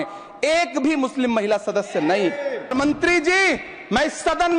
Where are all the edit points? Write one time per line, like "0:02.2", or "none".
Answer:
0:02.7